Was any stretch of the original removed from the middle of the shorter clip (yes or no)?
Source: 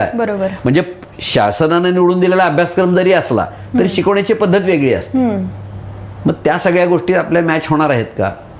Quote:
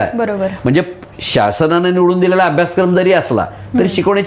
no